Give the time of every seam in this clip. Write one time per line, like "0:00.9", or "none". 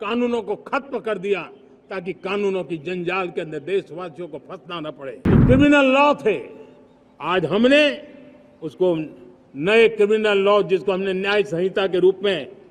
0:05.3